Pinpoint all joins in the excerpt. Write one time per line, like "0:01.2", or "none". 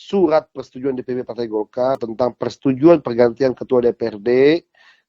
0:02.1